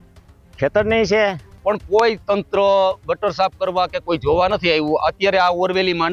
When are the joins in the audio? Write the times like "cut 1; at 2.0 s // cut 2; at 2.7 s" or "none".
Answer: cut 1; at 1.5 s